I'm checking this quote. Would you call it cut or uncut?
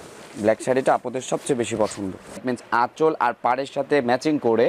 cut